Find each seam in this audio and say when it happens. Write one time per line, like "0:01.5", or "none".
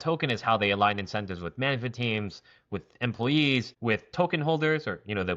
0:03.7